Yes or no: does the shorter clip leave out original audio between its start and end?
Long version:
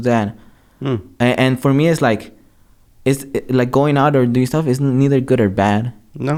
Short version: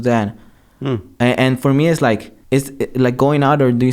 yes